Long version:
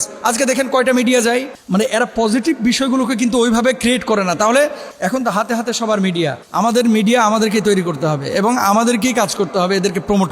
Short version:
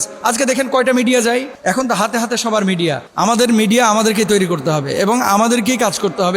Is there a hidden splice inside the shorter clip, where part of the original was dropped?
yes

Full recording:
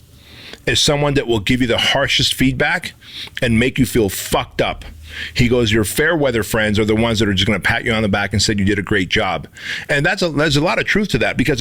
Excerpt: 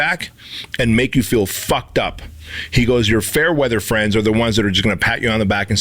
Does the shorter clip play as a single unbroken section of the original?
yes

